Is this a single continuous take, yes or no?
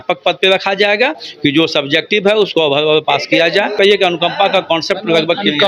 no